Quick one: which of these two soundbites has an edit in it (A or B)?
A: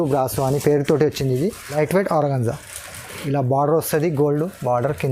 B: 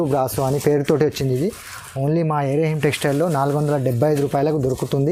A